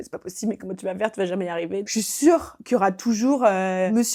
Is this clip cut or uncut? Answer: cut